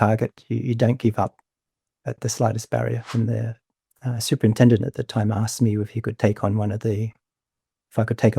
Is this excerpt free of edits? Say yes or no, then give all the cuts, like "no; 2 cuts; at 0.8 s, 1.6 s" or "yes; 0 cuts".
no; 1 cut; at 3.0 s